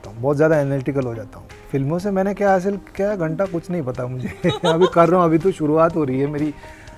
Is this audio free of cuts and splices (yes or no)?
no